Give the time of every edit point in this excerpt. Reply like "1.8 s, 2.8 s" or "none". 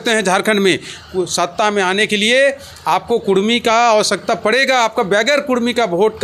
none